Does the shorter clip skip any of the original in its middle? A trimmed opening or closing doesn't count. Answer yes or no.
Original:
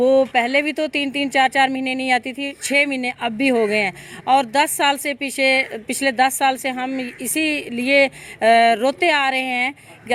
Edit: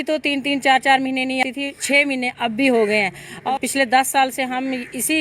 yes